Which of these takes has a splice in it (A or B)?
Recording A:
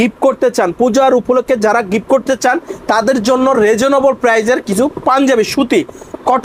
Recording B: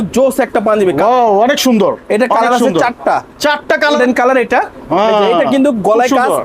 B